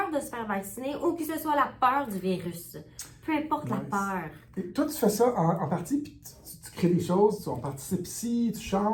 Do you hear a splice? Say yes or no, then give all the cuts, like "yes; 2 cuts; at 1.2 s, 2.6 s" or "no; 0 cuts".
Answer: no; 0 cuts